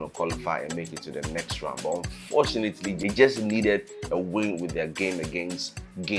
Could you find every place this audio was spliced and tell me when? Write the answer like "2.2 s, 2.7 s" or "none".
2.9 s